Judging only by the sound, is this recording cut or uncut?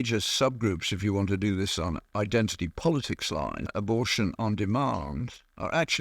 cut